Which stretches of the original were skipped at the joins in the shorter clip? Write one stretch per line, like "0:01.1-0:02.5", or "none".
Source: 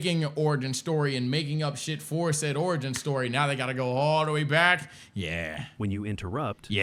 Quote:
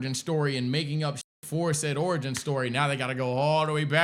none